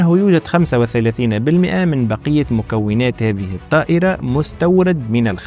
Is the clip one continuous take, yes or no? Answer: yes